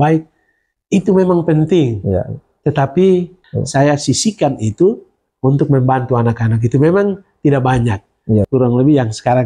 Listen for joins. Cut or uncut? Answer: cut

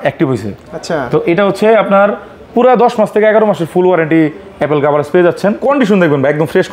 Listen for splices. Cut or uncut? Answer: cut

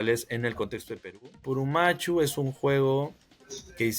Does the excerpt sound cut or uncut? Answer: cut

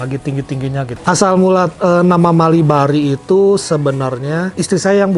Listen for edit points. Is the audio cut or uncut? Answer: cut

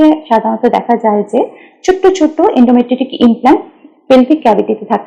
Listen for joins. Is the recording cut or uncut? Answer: uncut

